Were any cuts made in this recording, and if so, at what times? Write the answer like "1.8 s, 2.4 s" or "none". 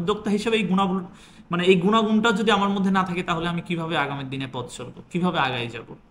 none